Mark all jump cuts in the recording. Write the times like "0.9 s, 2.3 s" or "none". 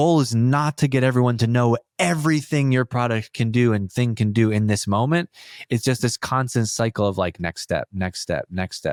none